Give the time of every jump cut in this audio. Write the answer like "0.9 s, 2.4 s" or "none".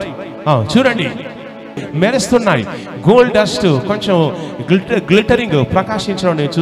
1.7 s